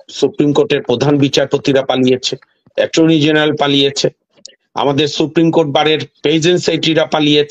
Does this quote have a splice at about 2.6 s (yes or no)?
no